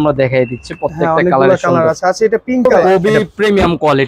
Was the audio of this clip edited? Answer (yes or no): yes